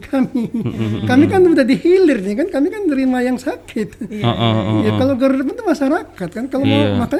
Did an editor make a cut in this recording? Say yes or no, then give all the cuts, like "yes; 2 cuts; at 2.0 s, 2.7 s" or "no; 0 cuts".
no; 0 cuts